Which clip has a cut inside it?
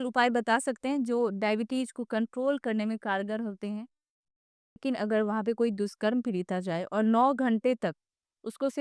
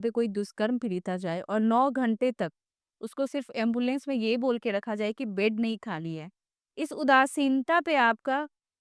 first; 1 cut; at 4.3 s

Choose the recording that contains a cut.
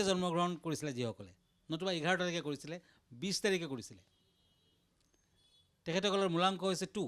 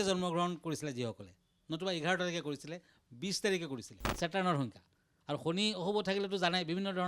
second; 1 cut; at 4.0 s

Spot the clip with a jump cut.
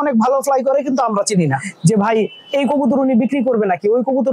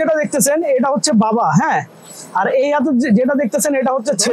first; 1 cut; at 1.7 s

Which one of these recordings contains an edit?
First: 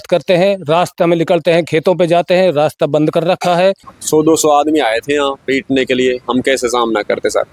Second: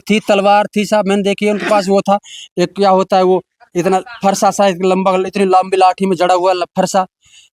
first; 1 cut; at 3.9 s

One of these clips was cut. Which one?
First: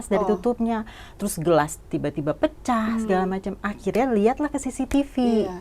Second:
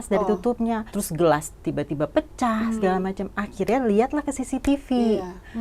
second; 1 cut; at 0.9 s

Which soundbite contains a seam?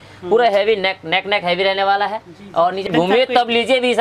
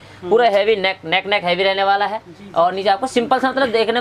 first; 1 cut; at 2.9 s

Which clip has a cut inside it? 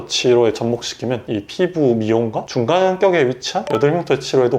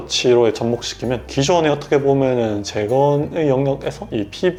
first; 1 cut; at 1.2 s

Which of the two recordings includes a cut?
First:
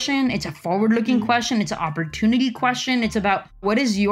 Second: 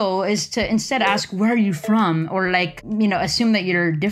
second; 1 cut; at 2.8 s

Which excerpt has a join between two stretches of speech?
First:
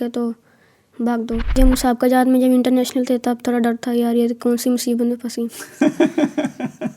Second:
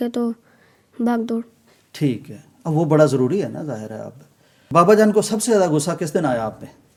first; 1 cut; at 1.6 s

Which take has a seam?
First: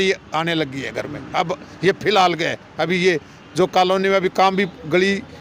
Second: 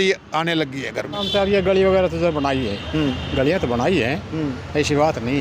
second; 1 cut; at 1.2 s

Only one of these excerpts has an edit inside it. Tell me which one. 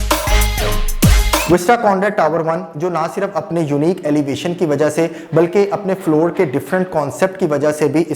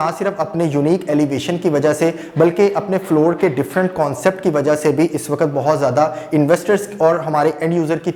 first; 1 cut; at 1.4 s

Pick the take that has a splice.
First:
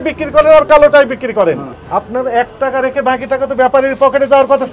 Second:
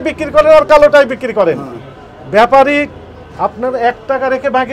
first; 1 cut; at 1.7 s

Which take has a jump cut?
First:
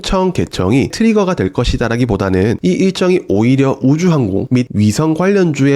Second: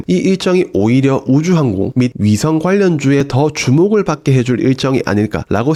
first; 1 cut; at 0.9 s

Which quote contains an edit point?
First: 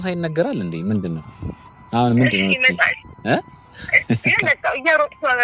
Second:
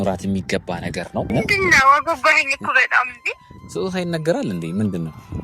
second; 1 cut; at 1.3 s

